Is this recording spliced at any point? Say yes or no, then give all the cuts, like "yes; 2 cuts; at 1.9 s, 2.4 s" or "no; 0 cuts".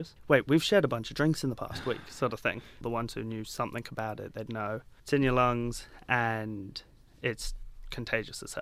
yes; 2 cuts; at 2.8 s, 4.9 s